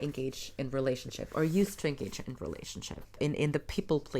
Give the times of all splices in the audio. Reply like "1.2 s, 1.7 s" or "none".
3.2 s